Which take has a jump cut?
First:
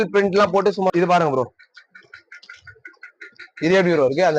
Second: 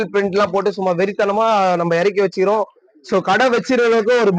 first; 1 cut; at 0.9 s

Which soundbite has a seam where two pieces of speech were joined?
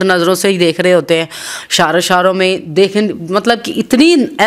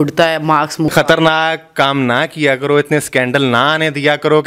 second; 1 cut; at 0.9 s

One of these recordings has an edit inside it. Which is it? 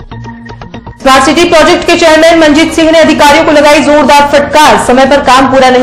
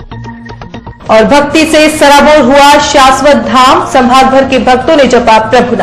second; 1 cut; at 1.0 s

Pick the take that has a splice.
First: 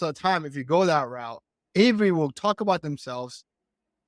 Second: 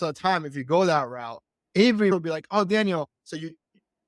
second; 1 cut; at 2.1 s

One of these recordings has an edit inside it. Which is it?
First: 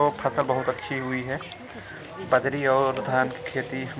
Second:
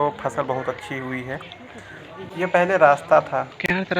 second; 1 cut; at 2.3 s

